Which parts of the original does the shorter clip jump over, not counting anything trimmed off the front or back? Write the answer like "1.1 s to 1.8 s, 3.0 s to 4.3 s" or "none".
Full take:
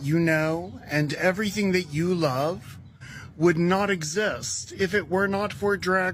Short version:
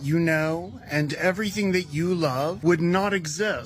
2.6 s to 3.3 s